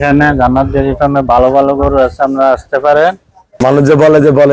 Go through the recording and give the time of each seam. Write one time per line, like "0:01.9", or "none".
0:03.6